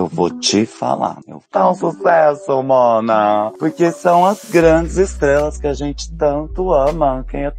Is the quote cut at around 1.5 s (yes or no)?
yes